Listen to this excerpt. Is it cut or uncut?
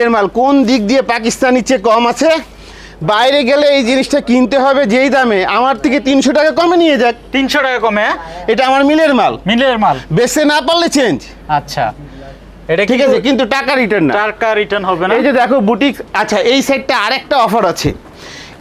uncut